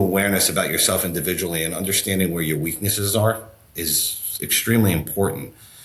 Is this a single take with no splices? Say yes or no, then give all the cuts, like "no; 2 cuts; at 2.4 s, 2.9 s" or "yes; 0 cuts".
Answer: yes; 0 cuts